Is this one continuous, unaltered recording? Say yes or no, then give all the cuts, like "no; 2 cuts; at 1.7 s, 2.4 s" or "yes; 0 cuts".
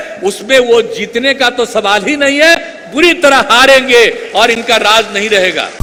yes; 0 cuts